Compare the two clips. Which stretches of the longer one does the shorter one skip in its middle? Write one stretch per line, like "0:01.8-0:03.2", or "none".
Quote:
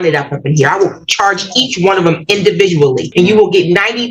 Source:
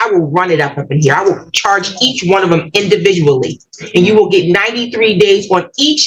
0:03.5-0:03.8